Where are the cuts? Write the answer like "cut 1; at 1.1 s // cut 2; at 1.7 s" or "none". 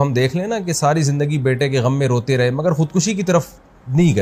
none